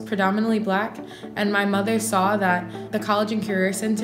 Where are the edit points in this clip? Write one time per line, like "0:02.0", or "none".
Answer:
0:02.8